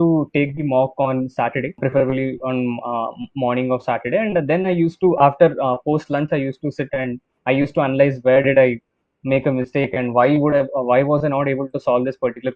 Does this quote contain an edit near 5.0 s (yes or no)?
no